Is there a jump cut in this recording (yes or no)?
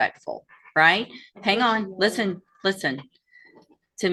no